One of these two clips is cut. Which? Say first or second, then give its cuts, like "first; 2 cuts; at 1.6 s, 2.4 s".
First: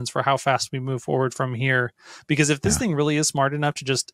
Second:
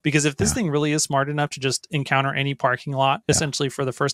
second; 1 cut; at 3.2 s